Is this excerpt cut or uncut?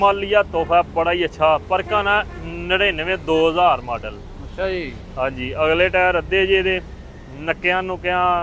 uncut